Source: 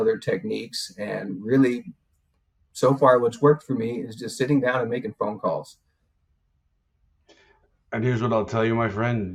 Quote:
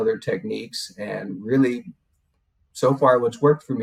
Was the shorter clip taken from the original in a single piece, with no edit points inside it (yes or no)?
yes